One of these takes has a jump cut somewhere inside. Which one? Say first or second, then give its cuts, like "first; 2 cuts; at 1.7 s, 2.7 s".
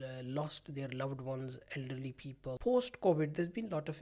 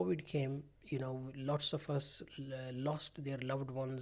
first; 1 cut; at 2.6 s